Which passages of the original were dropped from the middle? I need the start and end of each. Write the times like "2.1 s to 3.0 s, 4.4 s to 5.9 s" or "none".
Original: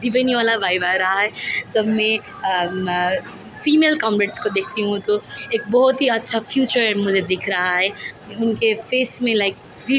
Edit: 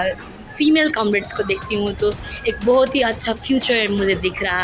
none